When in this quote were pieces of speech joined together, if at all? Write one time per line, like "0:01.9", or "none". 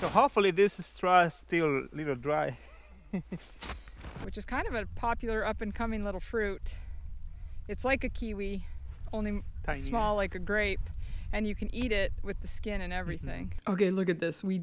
0:04.2
0:13.5